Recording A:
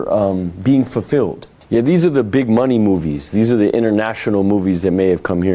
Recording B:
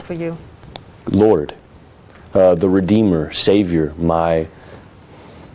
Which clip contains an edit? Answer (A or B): A